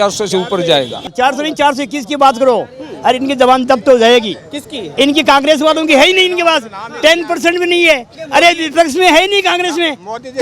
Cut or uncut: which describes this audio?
cut